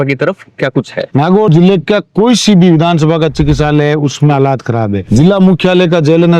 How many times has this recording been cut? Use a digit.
2